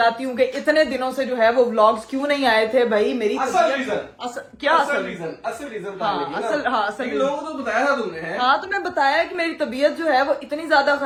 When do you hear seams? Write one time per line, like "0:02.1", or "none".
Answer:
none